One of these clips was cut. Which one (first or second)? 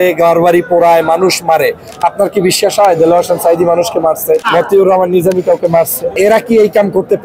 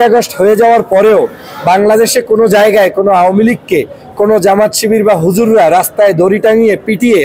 first